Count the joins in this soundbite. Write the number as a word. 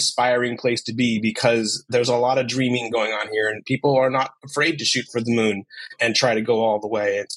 two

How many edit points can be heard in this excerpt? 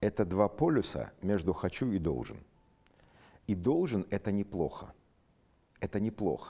zero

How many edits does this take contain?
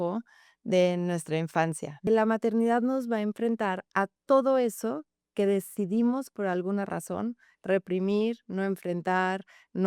one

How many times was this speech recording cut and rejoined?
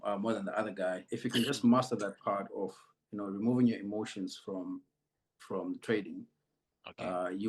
one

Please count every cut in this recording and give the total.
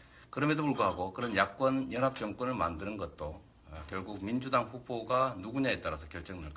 one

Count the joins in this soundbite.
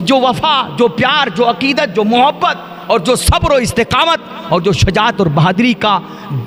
zero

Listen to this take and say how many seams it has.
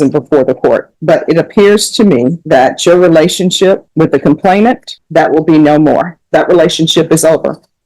five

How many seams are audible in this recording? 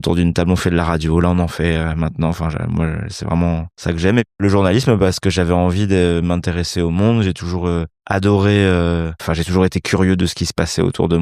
three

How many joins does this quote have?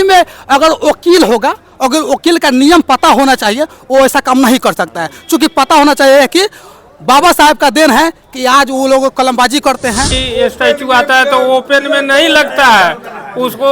one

